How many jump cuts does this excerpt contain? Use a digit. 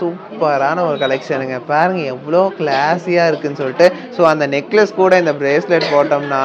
0